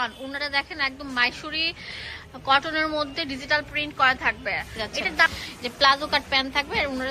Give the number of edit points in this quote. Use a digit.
1